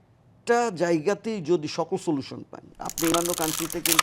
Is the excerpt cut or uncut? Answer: cut